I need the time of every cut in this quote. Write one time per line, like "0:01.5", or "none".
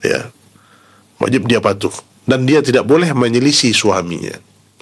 none

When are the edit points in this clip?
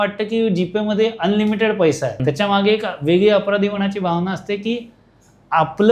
0:02.1

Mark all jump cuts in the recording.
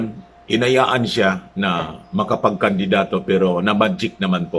none

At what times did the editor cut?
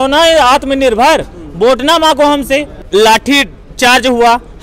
0:02.8

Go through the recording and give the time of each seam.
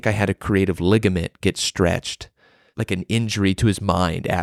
0:02.7

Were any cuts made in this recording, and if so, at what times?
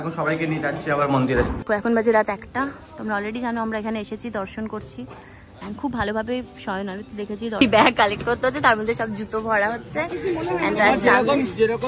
0:01.6
0:07.6

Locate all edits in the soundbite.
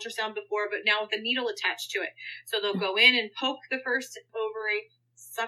0:04.3

